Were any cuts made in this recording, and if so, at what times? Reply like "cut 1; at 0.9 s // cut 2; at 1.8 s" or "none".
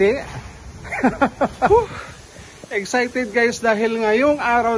cut 1; at 1.7 s